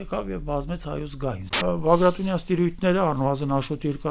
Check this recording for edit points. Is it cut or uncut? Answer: cut